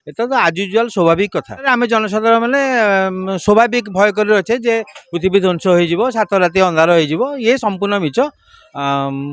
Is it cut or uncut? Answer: cut